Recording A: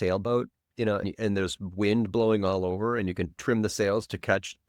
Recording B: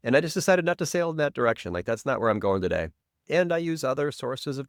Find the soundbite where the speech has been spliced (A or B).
A